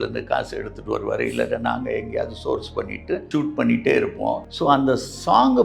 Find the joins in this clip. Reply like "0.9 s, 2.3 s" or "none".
3.2 s, 4.5 s